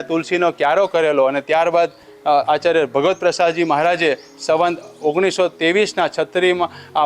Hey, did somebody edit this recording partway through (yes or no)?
no